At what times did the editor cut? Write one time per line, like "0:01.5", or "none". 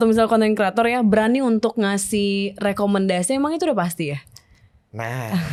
none